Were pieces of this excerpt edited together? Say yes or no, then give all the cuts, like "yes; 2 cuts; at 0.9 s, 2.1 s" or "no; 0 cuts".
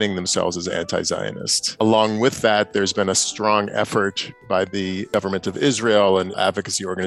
yes; 3 cuts; at 1.7 s, 5.1 s, 6.4 s